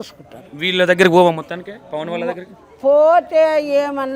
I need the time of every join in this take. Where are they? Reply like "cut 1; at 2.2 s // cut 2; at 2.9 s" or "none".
none

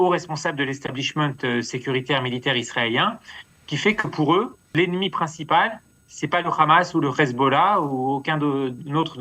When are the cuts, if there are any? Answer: cut 1; at 4.6 s

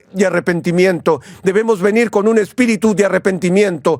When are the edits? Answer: cut 1; at 1.3 s

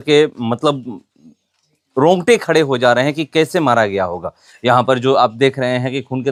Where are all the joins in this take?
none

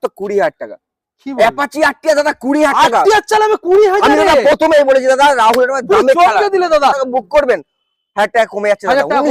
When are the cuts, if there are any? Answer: cut 1; at 7.0 s

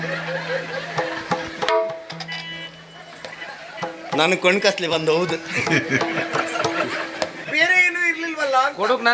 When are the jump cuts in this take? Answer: cut 1; at 7.4 s

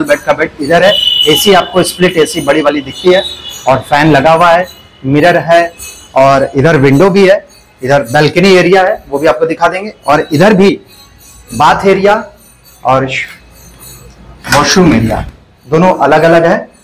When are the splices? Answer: none

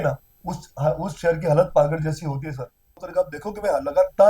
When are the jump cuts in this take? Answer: cut 1; at 3.0 s

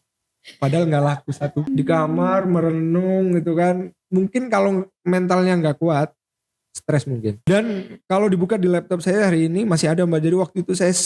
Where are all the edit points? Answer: cut 1; at 1.7 s // cut 2; at 7.4 s

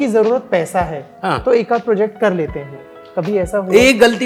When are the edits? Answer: none

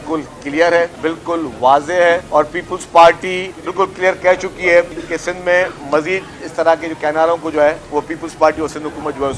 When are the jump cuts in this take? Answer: cut 1; at 0.9 s // cut 2; at 2.2 s // cut 3; at 3.6 s // cut 4; at 5.0 s // cut 5; at 7.8 s

